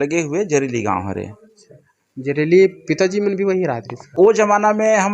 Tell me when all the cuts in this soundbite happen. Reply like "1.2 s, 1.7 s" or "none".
4.1 s